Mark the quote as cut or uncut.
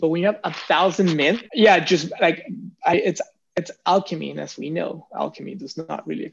cut